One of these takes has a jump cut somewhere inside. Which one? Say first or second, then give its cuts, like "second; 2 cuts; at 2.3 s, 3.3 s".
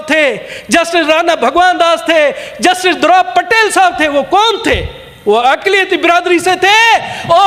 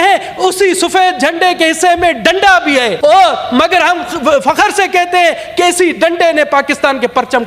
second; 1 cut; at 2.9 s